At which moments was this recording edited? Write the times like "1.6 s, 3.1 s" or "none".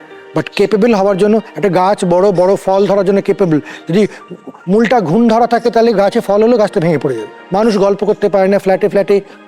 7.4 s